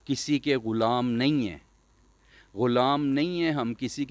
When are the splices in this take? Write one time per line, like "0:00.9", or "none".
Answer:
none